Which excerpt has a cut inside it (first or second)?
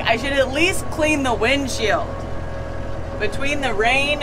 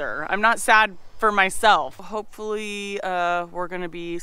second